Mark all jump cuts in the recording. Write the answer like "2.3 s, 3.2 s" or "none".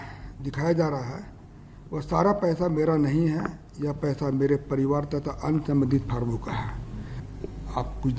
7.2 s